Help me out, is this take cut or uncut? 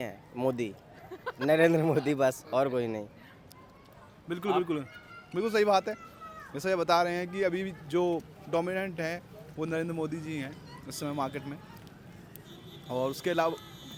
uncut